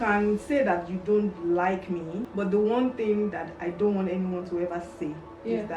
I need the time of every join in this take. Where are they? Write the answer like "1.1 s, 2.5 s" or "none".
2.2 s